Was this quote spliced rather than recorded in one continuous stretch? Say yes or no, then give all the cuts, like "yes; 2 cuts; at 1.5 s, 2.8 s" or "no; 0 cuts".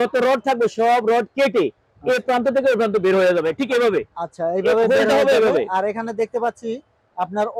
no; 0 cuts